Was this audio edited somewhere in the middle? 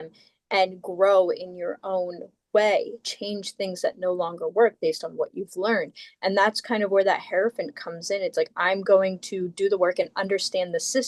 no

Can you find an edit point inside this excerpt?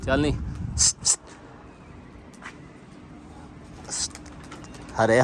no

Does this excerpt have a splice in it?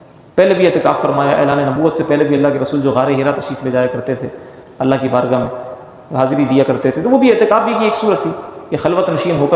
no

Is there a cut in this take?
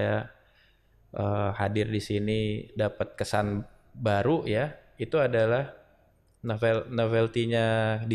no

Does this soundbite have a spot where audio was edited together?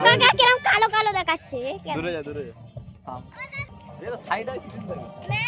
yes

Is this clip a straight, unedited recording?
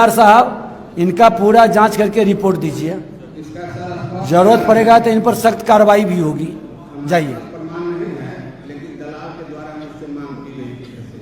yes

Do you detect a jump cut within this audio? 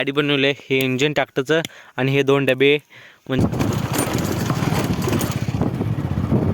yes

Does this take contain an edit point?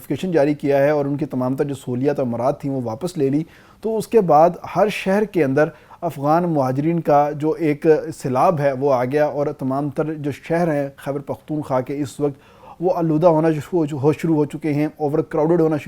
no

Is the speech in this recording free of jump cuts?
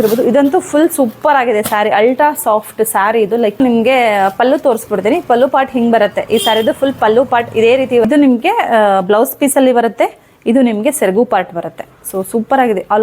no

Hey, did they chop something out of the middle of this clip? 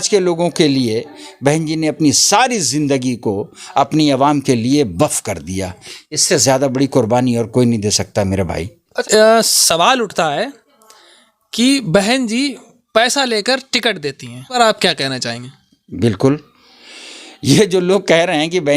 yes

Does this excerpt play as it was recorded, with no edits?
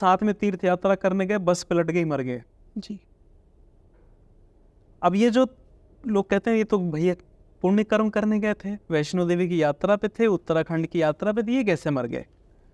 yes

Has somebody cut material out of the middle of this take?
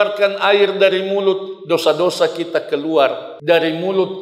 yes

